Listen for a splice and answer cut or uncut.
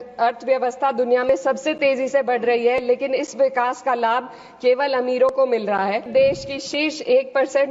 cut